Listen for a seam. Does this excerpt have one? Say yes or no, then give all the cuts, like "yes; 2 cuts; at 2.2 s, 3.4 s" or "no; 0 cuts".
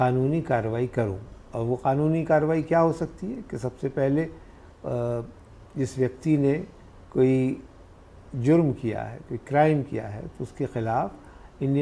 no; 0 cuts